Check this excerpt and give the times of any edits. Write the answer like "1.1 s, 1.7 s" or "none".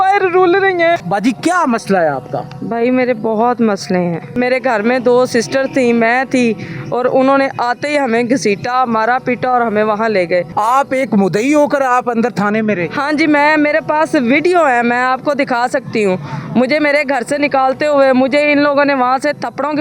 1.0 s, 4.3 s, 10.5 s